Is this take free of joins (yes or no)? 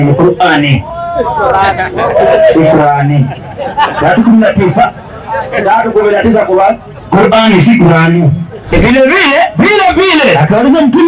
no